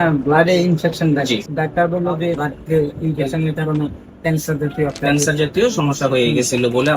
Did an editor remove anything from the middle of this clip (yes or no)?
yes